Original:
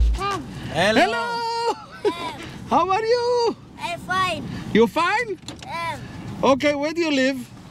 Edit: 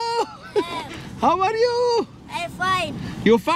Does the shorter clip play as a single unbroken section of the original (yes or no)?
yes